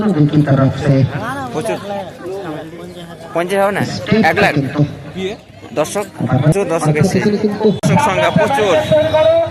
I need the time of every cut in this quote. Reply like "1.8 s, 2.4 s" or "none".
7.8 s